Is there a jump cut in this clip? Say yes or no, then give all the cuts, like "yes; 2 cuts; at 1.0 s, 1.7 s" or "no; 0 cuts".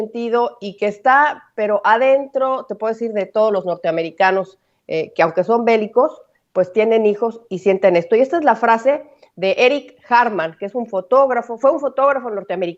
no; 0 cuts